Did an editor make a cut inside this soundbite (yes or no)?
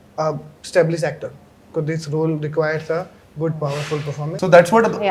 yes